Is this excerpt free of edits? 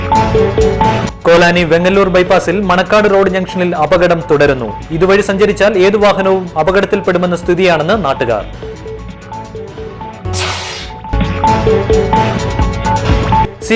no; 1 cut; at 0.9 s

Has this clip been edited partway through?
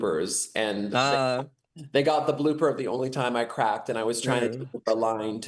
no; 0 cuts

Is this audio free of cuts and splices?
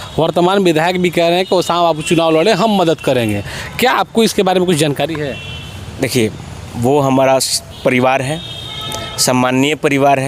yes; 0 cuts

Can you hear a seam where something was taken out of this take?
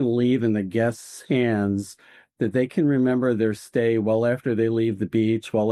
no; 0 cuts

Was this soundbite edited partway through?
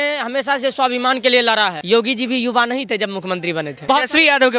yes; 2 cuts; at 1.8 s, 3.8 s

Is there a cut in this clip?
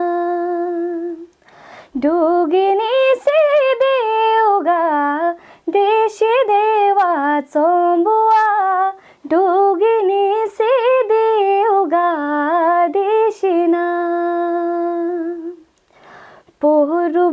no; 0 cuts

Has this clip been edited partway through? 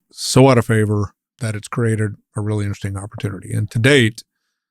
yes; 1 cut; at 1.2 s

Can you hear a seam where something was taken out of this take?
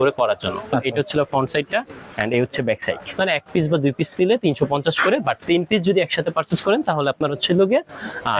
yes; 2 cuts; at 0.7 s, 3.1 s

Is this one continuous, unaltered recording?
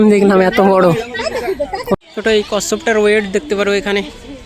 no; 1 cut; at 1.9 s

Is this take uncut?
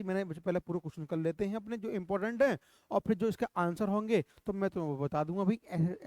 yes; 0 cuts

